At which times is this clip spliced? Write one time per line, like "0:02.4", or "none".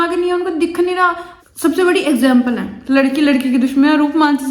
0:01.3